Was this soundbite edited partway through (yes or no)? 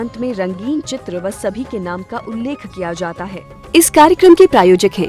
yes